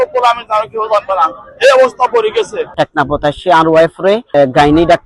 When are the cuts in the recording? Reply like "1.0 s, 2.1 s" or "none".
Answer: 2.7 s